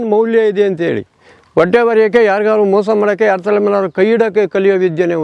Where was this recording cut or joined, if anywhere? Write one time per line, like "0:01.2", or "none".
none

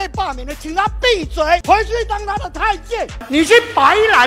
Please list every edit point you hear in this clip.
0:01.6
0:03.2

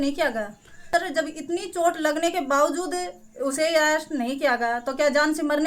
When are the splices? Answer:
0:01.0

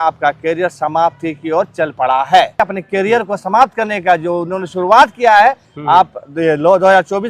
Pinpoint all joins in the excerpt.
0:02.6

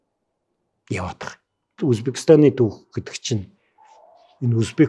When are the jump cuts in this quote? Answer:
0:01.8

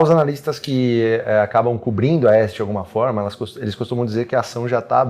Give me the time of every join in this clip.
none

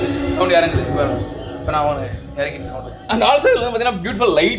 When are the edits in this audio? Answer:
0:02.9

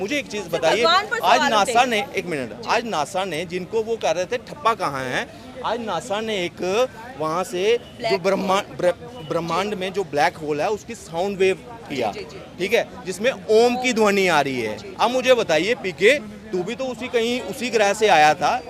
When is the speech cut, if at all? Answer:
none

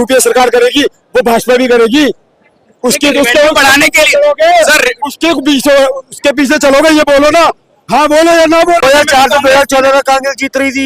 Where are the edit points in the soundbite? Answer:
0:08.8

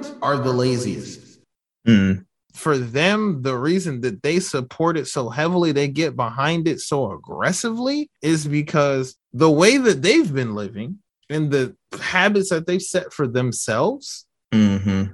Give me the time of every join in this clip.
none

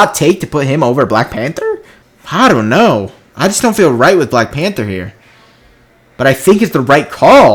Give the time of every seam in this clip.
none

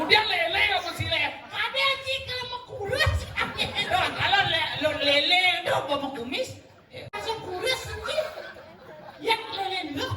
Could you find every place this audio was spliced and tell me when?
0:07.2

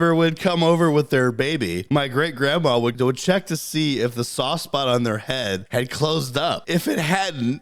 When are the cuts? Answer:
0:01.8
0:02.9
0:05.6
0:06.6

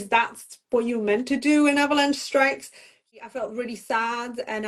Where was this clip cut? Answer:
0:03.0

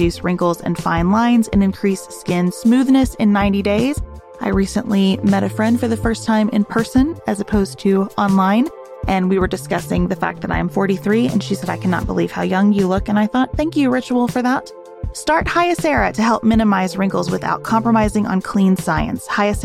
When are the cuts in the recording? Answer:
none

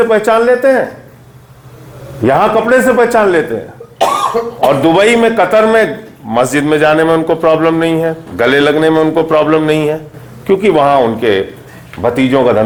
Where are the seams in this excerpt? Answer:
none

